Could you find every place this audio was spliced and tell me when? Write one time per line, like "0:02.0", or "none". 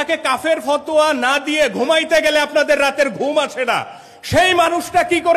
none